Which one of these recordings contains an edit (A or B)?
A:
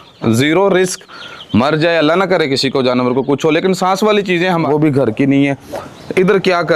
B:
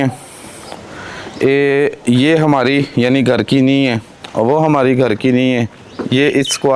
A